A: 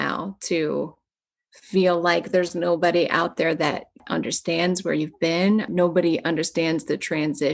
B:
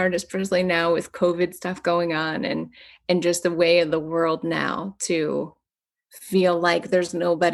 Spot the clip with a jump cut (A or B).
A